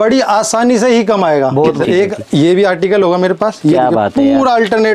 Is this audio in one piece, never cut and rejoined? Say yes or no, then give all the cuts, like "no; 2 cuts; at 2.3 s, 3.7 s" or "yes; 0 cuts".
no; 1 cut; at 1.8 s